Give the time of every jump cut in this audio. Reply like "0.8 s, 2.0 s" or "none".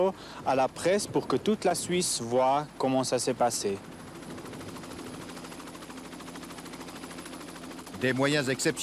none